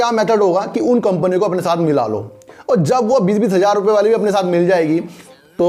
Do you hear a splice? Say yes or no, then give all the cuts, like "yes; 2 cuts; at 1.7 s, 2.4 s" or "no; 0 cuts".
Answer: no; 0 cuts